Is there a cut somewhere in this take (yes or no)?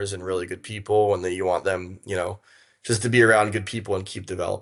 no